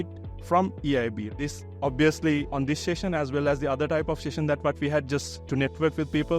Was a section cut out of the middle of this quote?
yes; 1 cut; at 1.3 s

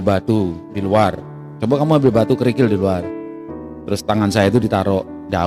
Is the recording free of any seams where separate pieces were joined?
yes; 0 cuts

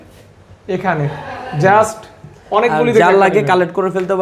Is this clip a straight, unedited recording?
yes; 0 cuts

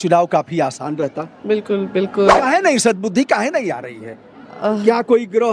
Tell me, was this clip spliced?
yes; 1 cut; at 2.4 s

